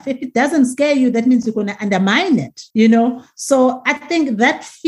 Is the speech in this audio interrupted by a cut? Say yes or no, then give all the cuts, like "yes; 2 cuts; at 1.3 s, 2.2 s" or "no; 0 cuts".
yes; 1 cut; at 2.6 s